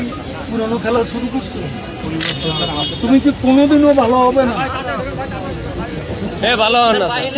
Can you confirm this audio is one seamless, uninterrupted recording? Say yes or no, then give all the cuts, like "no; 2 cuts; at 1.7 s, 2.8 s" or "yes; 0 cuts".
yes; 0 cuts